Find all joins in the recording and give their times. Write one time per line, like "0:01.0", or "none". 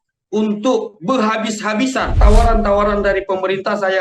0:02.2